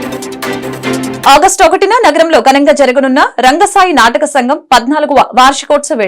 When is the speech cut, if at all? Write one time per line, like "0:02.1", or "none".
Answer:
0:01.2